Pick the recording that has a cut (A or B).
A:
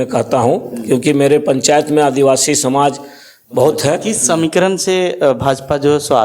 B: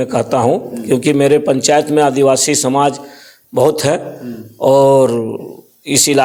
A